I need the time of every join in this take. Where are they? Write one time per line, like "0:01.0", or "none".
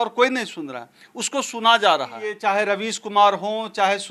0:02.4